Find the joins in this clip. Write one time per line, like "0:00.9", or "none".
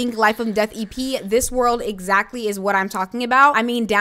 none